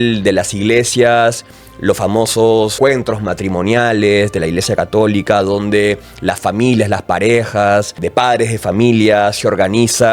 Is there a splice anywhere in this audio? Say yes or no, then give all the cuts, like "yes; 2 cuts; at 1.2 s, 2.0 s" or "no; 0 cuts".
yes; 2 cuts; at 2.7 s, 8.0 s